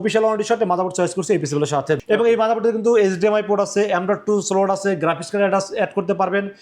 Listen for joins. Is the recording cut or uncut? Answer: cut